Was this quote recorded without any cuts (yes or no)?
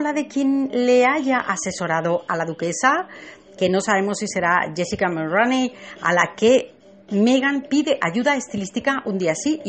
no